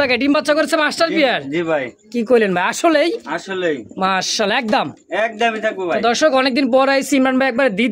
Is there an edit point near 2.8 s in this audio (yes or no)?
no